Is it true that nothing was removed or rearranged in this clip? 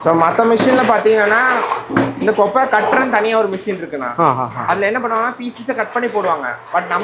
yes; 0 cuts

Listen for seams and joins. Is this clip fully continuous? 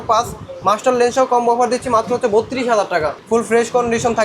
no; 1 cut; at 3.2 s

